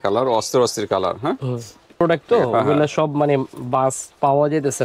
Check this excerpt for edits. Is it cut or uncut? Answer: cut